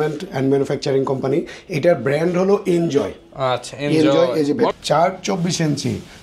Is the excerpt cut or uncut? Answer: cut